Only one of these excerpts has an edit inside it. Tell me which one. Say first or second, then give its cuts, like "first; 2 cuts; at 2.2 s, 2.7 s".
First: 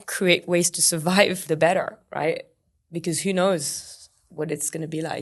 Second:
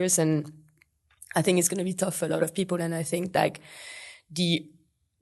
first; 2 cuts; at 1.4 s, 2.6 s